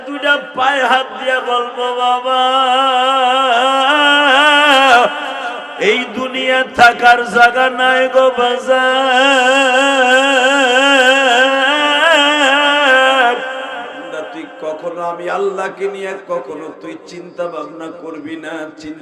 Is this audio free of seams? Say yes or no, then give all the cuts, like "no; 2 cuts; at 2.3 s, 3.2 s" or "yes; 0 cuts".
no; 1 cut; at 14.0 s